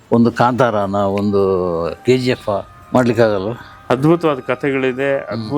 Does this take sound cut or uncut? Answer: cut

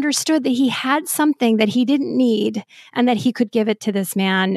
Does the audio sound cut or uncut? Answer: uncut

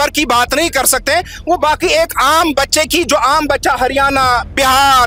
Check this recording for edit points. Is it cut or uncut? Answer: uncut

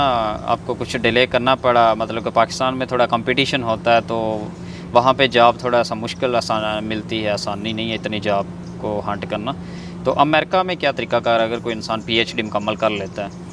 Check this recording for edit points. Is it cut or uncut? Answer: uncut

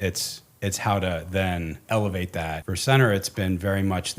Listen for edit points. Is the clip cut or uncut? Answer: cut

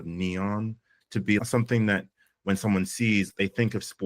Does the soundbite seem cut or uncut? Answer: cut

